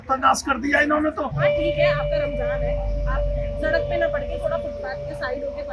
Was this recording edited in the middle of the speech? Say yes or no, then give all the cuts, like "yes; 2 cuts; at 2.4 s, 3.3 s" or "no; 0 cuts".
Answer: yes; 1 cut; at 1.3 s